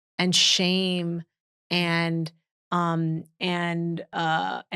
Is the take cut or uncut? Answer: uncut